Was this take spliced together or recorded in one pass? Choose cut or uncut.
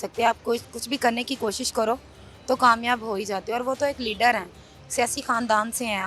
uncut